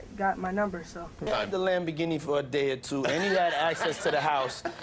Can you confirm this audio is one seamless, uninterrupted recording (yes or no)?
no